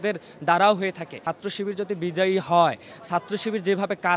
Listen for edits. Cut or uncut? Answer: cut